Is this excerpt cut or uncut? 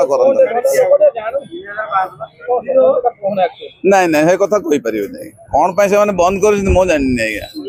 uncut